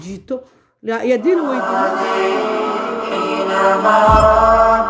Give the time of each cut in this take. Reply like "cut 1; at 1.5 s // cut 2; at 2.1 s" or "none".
cut 1; at 1.6 s